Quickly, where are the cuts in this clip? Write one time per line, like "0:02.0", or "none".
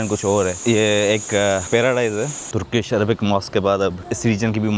0:02.4